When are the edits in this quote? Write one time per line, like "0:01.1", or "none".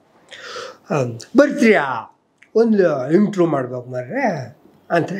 none